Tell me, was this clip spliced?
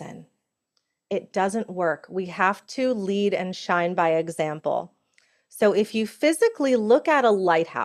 no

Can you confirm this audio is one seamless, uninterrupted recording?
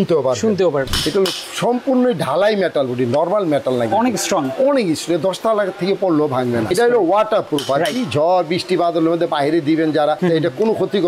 no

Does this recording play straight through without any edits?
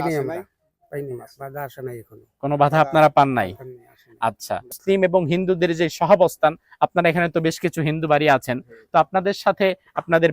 no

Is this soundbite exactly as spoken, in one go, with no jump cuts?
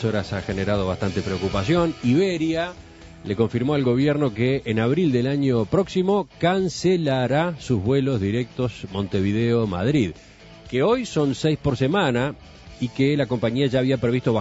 no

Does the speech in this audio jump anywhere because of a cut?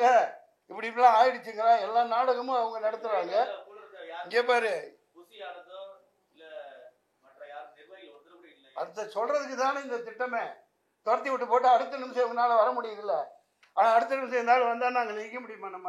no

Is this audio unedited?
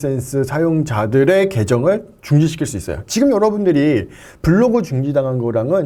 yes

